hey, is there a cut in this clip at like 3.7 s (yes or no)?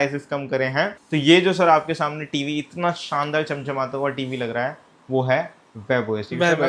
no